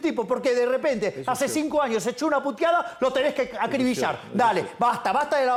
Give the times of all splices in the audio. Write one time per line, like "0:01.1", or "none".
none

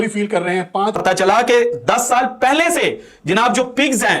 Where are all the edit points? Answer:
0:01.0

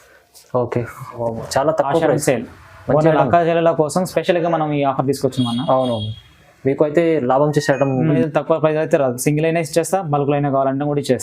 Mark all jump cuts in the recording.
0:01.2
0:08.2

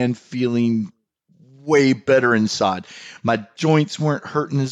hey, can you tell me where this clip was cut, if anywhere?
none

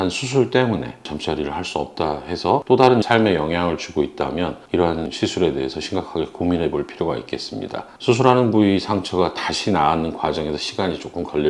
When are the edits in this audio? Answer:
0:01.0
0:02.6
0:05.1

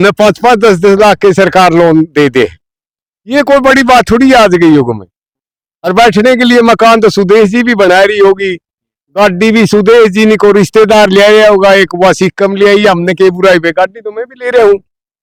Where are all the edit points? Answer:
none

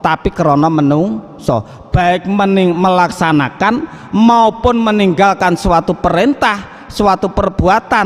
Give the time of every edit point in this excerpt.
none

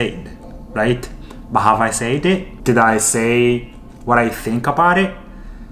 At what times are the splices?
none

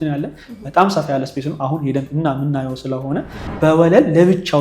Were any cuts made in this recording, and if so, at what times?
0:03.4

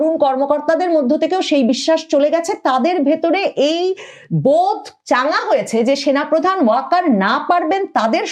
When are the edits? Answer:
none

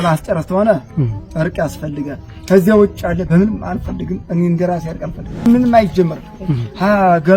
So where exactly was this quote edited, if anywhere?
0:05.5

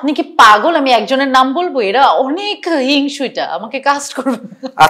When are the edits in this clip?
none

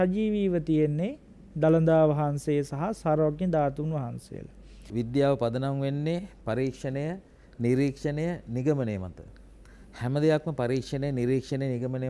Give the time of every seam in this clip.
0:04.8

